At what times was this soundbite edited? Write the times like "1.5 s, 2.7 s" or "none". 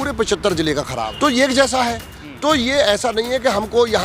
1.0 s